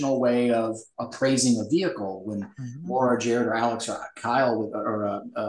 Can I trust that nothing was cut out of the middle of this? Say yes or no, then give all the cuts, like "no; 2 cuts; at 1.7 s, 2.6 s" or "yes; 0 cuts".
yes; 0 cuts